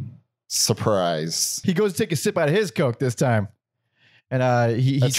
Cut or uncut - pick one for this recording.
cut